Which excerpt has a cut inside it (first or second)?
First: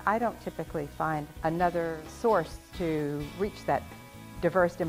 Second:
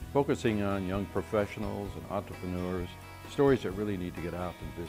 first